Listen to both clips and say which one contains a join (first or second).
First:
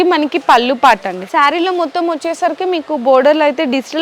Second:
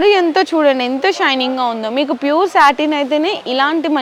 first